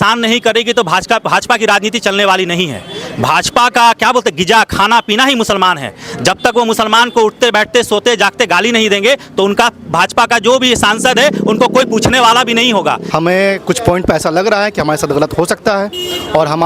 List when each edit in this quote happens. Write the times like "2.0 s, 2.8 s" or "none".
13.0 s